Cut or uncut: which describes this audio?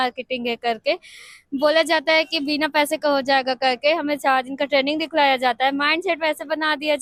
uncut